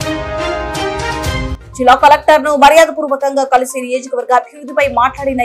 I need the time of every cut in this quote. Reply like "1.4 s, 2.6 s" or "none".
1.5 s